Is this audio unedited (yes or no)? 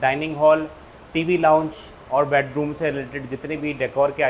yes